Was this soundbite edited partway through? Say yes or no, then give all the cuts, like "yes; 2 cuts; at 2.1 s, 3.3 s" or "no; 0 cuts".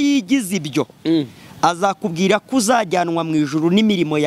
no; 0 cuts